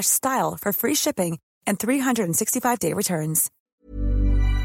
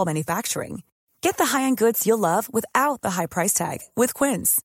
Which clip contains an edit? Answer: first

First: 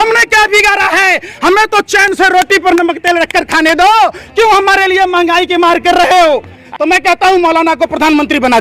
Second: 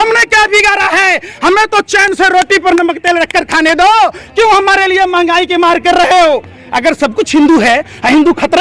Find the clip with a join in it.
first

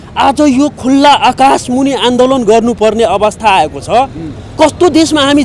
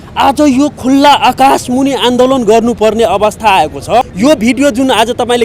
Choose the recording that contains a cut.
second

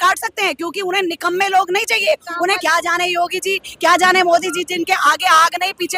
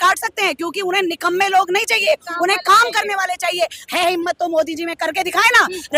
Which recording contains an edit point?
first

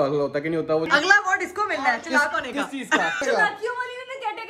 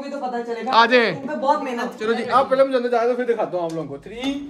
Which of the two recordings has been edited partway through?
first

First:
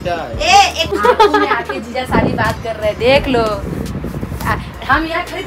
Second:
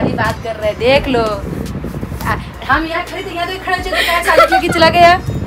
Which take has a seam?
first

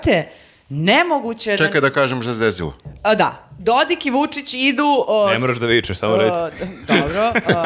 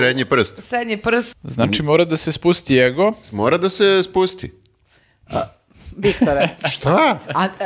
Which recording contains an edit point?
second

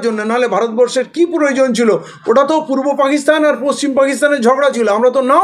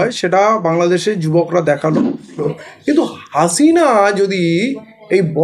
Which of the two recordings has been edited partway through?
second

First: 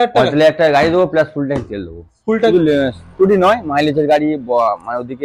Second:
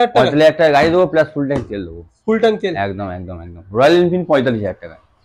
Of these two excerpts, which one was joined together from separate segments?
first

